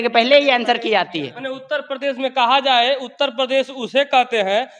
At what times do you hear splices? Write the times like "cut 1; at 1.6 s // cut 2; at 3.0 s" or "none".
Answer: none